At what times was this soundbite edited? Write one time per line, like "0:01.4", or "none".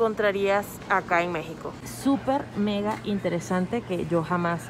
0:01.7